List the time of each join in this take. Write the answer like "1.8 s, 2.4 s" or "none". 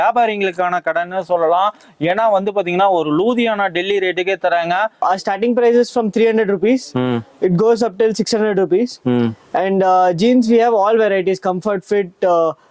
none

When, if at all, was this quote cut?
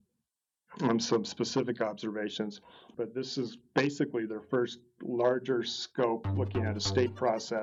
none

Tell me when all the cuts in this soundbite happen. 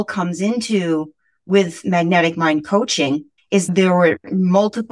3.7 s

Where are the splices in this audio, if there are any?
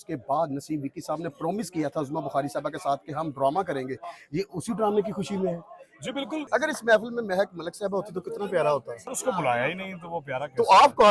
6.4 s, 9.0 s

